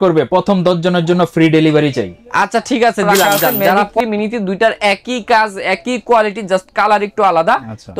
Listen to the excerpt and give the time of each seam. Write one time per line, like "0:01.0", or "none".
0:04.0